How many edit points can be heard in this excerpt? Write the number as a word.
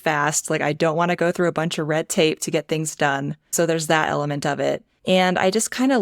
two